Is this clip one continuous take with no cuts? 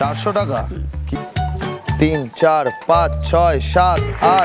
no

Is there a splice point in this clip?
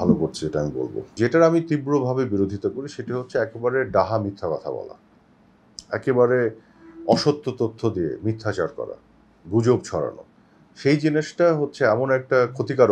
yes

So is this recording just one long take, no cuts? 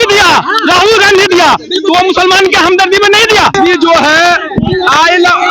no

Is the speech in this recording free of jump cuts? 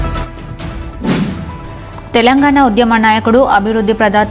no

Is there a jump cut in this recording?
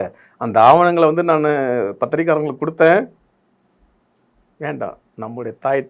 no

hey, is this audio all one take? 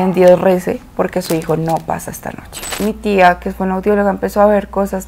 no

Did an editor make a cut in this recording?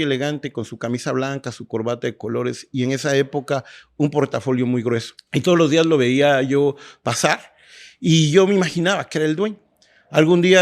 yes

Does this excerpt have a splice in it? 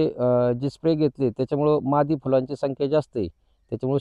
no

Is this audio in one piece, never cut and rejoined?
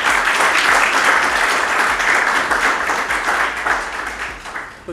yes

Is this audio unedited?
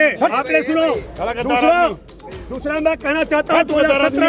yes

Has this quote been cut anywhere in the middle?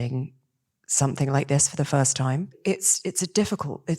yes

